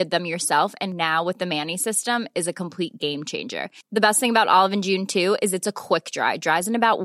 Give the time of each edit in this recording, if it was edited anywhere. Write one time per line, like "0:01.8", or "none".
none